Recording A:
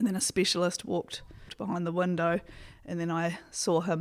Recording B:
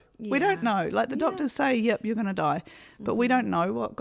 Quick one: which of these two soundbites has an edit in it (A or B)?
A